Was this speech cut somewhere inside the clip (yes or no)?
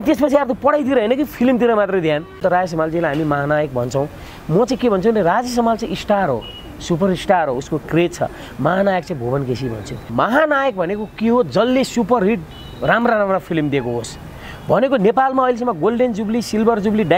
yes